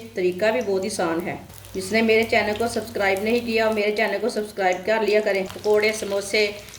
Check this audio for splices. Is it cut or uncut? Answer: cut